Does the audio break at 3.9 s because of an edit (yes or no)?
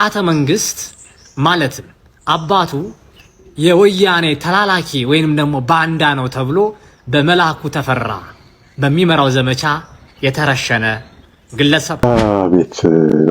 no